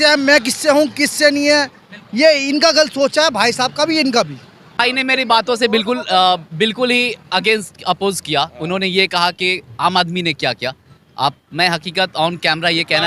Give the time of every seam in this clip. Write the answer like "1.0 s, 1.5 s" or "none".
4.9 s

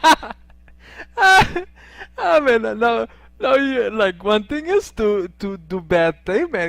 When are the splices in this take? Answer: 5.4 s

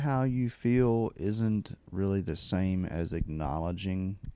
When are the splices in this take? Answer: none

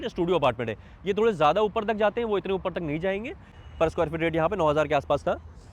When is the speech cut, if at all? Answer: 3.6 s

